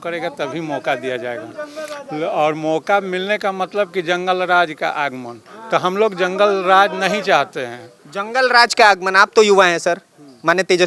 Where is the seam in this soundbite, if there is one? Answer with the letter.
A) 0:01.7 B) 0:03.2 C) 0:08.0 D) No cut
D